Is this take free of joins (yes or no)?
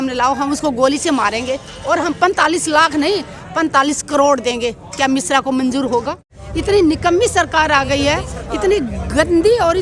no